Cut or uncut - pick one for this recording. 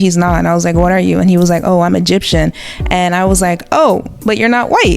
uncut